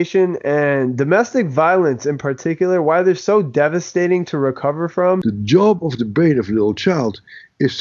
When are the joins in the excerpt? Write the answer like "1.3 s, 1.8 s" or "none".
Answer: 5.2 s